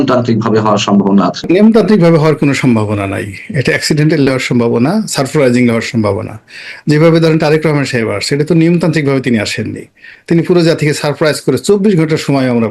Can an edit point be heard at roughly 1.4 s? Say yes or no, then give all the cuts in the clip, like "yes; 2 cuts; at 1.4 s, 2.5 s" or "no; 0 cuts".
yes; 1 cut; at 1.4 s